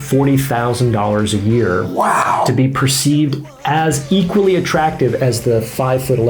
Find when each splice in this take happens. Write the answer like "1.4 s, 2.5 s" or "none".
none